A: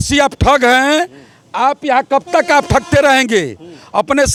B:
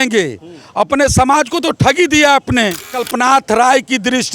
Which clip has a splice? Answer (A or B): B